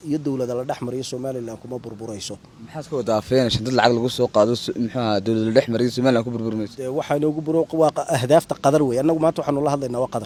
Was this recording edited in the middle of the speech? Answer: no; 0 cuts

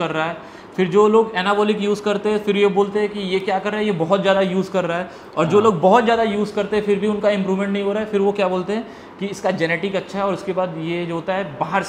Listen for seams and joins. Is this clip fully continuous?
yes; 0 cuts

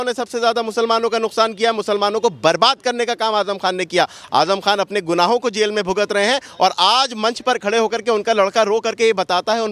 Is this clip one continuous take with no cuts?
yes; 0 cuts

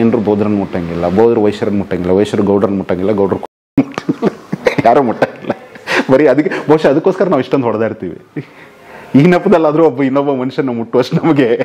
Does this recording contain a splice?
no; 0 cuts

